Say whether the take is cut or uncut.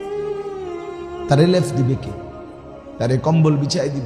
cut